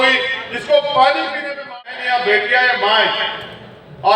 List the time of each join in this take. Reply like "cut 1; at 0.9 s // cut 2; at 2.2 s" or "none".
cut 1; at 1.8 s